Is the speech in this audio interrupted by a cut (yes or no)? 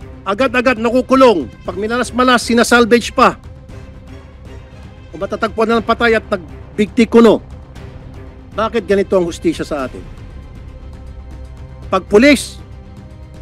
yes